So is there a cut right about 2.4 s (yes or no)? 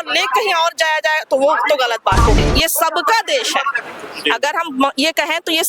yes